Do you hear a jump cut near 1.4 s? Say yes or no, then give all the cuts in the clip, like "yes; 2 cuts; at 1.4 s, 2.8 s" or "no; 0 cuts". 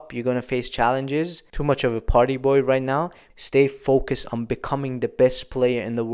yes; 2 cuts; at 1.4 s, 3.2 s